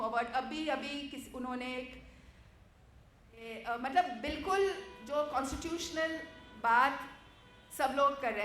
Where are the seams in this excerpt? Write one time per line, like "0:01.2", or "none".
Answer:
0:03.5